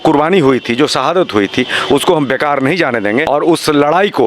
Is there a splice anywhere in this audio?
yes; 1 cut; at 3.3 s

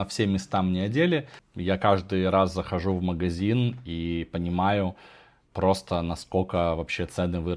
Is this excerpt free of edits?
no; 1 cut; at 1.4 s

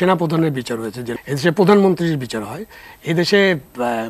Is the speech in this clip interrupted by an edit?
yes; 1 cut; at 1.1 s

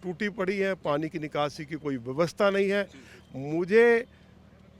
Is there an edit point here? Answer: no; 0 cuts

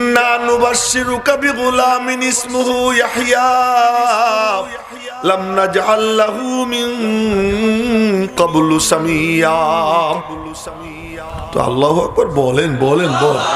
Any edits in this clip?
no; 0 cuts

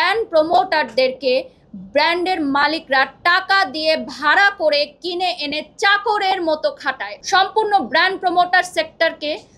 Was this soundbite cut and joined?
yes; 1 cut; at 7.2 s

